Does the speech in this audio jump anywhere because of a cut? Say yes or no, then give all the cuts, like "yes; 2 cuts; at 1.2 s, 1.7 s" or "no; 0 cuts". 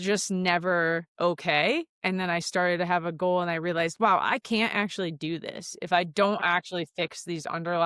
no; 0 cuts